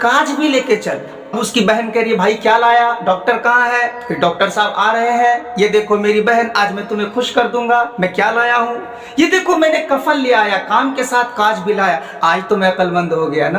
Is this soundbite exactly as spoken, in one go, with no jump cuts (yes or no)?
no